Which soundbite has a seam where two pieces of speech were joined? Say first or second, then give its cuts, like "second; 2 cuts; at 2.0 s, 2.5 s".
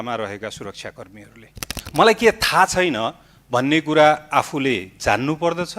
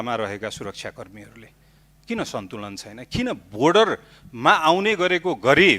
first; 1 cut; at 1.8 s